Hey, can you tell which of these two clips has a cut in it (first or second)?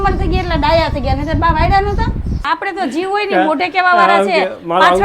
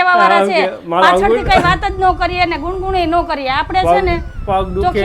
first